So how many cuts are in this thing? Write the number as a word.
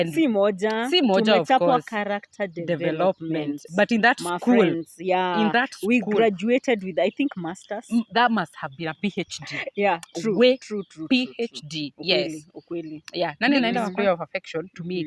one